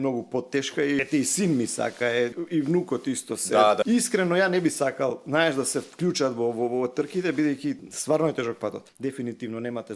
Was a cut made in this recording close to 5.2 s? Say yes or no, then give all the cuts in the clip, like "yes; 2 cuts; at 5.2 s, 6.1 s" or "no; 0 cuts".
no; 5 cuts; at 1.1 s, 2.4 s, 3.8 s, 7.9 s, 8.9 s